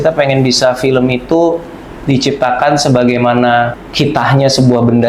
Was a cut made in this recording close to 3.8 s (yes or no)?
yes